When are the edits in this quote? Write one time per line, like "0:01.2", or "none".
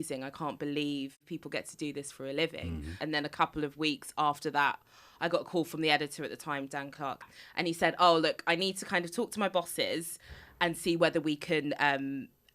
0:01.3
0:03.0
0:07.3